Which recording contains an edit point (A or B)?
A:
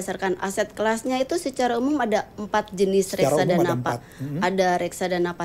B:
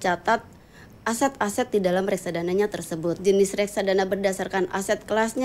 B